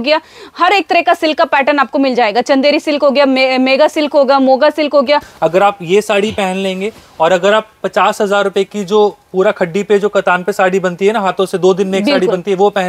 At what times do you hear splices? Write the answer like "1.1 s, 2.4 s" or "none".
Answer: 5.3 s